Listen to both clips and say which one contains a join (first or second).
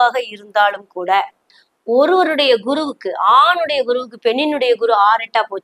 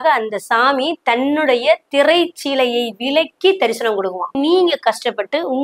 second